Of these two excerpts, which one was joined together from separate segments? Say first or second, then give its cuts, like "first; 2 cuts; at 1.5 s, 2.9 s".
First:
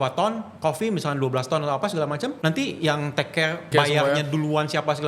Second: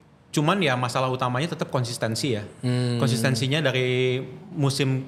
first; 2 cuts; at 2.4 s, 3.6 s